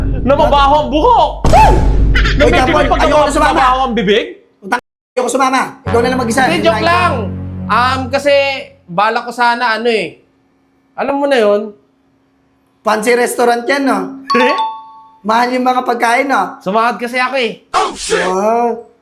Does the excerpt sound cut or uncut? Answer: uncut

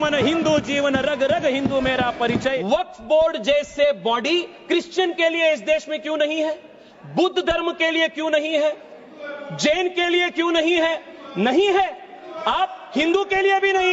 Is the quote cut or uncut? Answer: cut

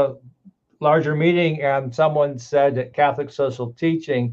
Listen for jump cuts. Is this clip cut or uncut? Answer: uncut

